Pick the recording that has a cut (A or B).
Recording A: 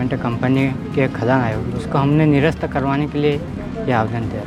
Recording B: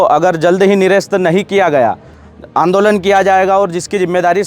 B